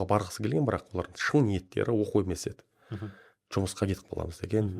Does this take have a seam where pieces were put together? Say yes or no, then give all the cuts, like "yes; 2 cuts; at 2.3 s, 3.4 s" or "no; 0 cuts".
no; 0 cuts